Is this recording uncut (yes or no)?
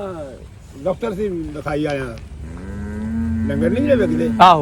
yes